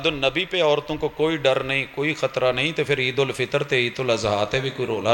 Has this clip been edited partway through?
no; 0 cuts

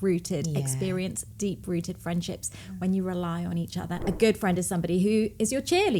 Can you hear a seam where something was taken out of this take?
yes; 1 cut; at 3.9 s

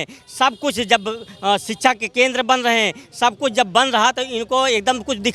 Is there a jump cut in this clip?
no; 0 cuts

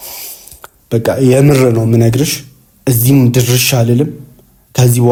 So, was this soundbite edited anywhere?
no; 0 cuts

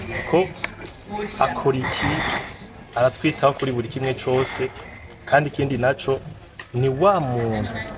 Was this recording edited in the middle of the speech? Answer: no; 0 cuts

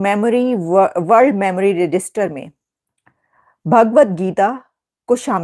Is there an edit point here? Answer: no; 0 cuts

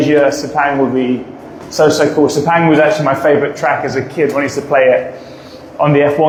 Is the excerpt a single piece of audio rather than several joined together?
yes; 0 cuts

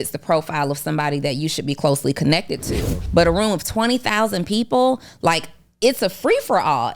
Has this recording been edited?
yes; 1 cut; at 2.9 s

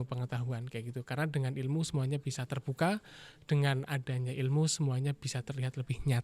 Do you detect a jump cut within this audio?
no; 0 cuts

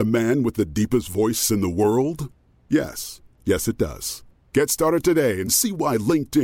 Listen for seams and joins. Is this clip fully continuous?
yes; 0 cuts

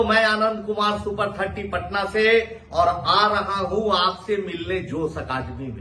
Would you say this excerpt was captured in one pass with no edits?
yes; 0 cuts

